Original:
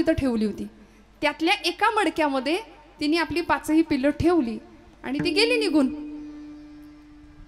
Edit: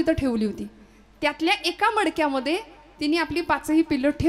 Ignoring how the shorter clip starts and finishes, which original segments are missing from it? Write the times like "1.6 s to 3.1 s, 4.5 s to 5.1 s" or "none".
none